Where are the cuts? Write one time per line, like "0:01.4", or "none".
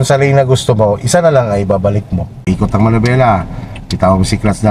0:02.5